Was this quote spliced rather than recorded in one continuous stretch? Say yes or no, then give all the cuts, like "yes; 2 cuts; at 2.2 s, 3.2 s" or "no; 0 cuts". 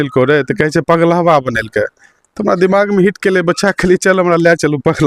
no; 0 cuts